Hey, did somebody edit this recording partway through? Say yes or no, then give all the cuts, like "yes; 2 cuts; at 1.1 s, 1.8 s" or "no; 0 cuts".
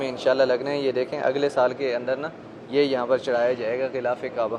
no; 0 cuts